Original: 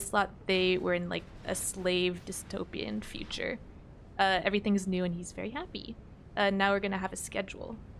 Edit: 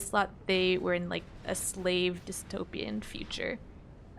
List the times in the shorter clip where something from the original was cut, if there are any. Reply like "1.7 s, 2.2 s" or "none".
none